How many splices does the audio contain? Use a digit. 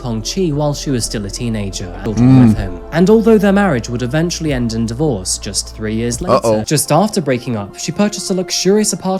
2